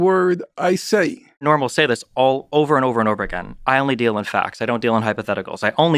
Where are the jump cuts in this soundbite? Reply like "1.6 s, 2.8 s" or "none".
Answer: 1.4 s